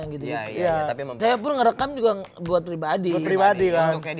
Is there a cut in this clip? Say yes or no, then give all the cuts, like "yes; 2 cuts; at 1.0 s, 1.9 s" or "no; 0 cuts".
yes; 1 cut; at 1.2 s